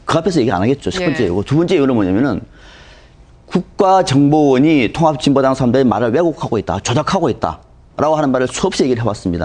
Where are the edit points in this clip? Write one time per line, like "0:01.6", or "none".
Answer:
none